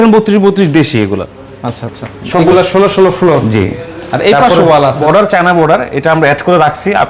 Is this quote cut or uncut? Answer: cut